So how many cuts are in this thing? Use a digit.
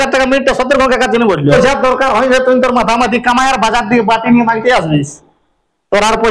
1